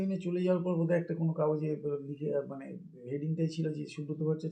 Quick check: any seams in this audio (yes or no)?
no